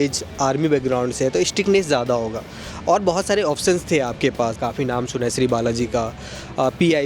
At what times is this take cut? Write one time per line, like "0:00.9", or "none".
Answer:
0:04.6